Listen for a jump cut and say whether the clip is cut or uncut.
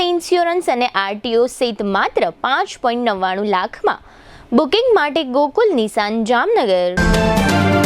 cut